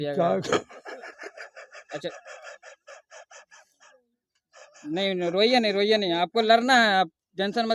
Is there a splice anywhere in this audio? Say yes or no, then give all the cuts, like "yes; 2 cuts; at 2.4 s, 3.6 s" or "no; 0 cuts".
no; 0 cuts